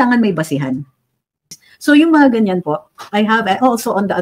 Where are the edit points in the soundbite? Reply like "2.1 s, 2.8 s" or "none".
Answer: 1.7 s